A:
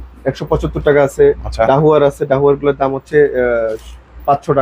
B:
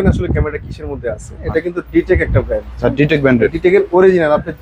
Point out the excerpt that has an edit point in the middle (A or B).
B